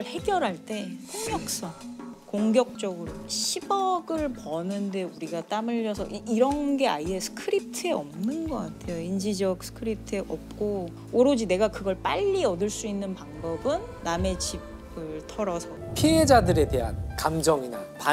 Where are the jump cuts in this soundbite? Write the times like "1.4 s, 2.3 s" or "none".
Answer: 15.7 s